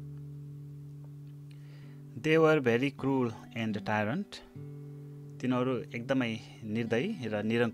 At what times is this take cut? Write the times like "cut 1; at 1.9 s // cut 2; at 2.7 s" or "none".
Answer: cut 1; at 2.2 s